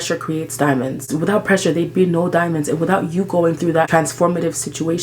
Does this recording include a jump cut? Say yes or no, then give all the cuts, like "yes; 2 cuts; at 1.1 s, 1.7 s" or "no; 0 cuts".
yes; 2 cuts; at 1.1 s, 3.9 s